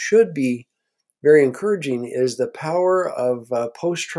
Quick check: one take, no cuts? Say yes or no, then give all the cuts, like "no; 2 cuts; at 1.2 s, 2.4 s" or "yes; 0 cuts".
yes; 0 cuts